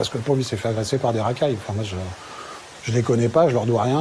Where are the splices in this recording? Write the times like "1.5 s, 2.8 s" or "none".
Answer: none